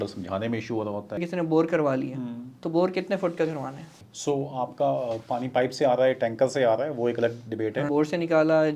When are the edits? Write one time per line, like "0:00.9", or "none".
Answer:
0:01.2
0:04.0
0:07.9